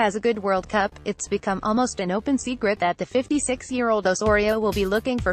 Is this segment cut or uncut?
uncut